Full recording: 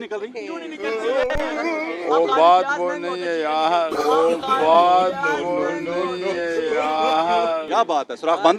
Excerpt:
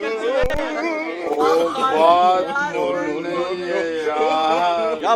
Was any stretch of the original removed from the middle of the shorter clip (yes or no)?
yes